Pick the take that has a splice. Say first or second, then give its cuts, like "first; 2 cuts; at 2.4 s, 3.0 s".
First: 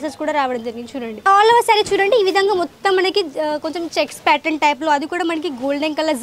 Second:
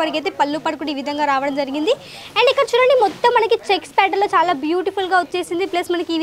first; 1 cut; at 1.2 s